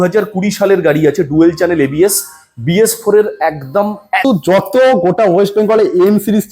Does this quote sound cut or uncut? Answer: cut